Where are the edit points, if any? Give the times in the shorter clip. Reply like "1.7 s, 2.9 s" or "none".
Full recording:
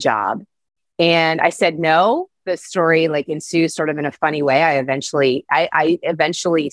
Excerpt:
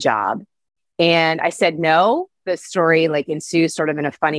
none